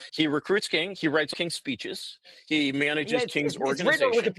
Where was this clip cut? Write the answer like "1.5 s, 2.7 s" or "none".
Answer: 1.3 s